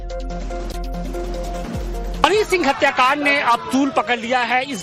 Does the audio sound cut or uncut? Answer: cut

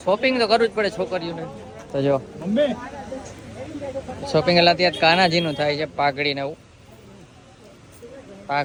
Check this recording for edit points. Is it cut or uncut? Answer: uncut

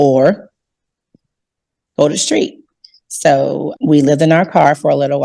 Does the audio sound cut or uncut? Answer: cut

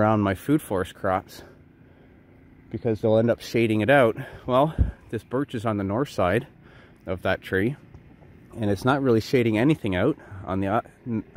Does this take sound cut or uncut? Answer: uncut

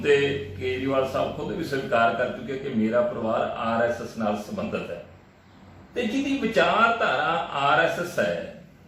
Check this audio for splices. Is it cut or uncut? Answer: uncut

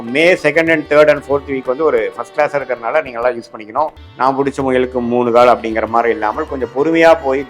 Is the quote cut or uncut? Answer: cut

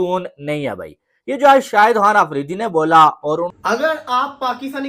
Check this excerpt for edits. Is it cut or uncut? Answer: cut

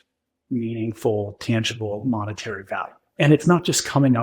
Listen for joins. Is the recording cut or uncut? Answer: cut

